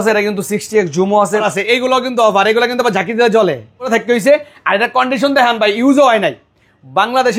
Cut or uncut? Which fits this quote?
cut